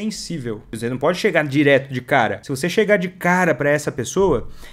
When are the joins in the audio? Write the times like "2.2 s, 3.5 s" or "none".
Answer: 0.8 s, 2.4 s